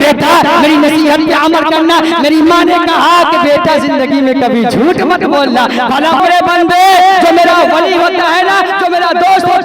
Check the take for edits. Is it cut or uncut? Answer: cut